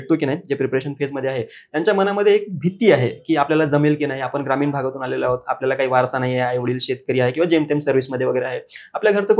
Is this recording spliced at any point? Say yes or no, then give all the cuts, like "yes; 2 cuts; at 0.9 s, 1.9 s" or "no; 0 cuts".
no; 0 cuts